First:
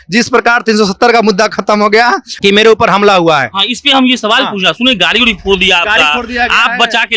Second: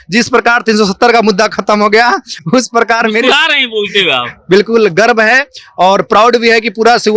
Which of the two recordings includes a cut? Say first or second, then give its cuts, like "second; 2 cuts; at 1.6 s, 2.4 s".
first; 1 cut; at 2.3 s